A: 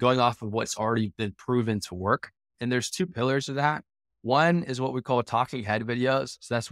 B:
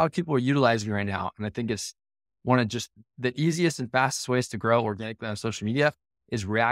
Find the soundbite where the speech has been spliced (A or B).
A